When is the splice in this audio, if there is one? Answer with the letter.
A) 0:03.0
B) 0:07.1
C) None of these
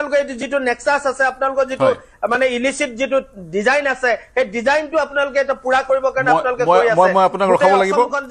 C